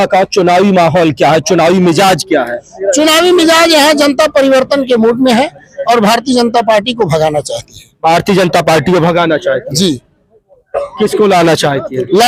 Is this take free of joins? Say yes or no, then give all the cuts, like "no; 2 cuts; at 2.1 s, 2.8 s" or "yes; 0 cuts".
yes; 0 cuts